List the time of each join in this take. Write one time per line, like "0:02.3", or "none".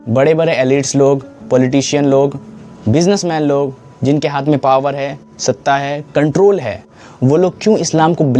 none